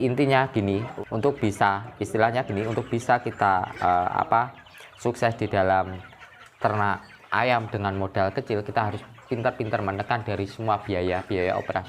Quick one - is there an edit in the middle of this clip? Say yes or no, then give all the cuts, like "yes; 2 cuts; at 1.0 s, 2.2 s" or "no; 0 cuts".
yes; 1 cut; at 0.9 s